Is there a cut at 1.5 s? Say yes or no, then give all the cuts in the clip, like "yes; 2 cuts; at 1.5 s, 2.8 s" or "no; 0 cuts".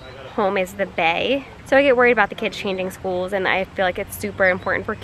yes; 1 cut; at 1.5 s